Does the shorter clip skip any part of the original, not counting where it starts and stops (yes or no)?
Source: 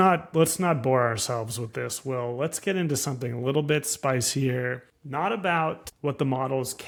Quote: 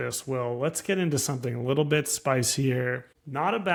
no